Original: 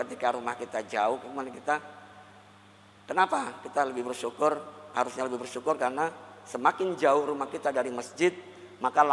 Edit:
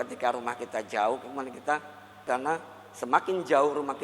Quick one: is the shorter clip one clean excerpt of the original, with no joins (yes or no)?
no